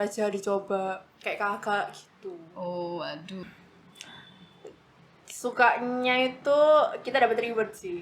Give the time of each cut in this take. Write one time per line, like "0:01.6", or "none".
0:03.4